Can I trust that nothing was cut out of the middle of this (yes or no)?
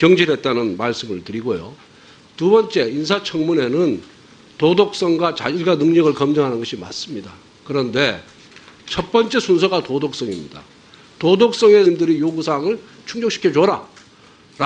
yes